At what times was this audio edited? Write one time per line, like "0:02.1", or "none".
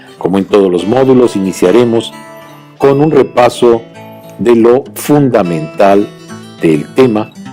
none